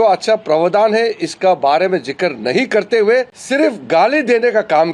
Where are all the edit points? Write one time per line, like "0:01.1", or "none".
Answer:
0:03.4